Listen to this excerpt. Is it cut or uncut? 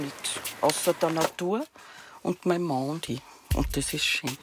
uncut